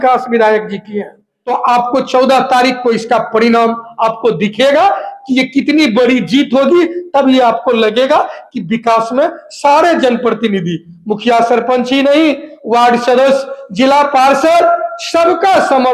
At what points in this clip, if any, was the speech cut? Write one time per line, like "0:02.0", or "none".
0:01.3